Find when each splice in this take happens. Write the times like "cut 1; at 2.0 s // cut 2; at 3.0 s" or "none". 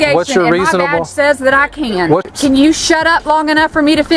cut 1; at 2.2 s